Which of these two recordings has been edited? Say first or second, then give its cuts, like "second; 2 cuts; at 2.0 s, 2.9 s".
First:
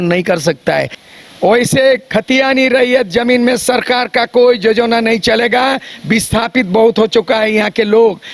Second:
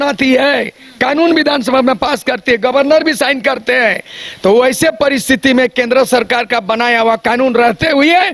first; 1 cut; at 1.0 s